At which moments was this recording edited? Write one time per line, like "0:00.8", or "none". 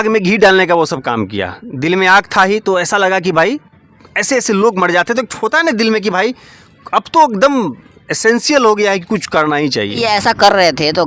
0:10.0